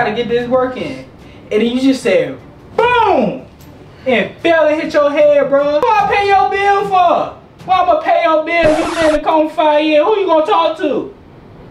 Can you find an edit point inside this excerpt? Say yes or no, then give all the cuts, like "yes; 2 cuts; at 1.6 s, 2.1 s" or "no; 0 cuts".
yes; 1 cut; at 5.8 s